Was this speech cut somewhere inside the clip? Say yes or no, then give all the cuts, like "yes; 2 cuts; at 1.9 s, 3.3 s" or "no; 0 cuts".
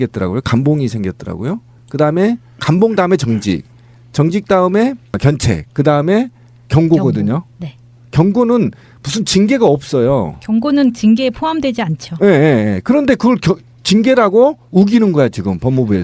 no; 0 cuts